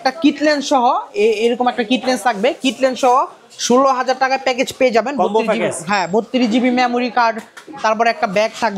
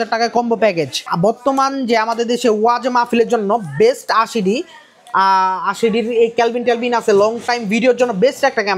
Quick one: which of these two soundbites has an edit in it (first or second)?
second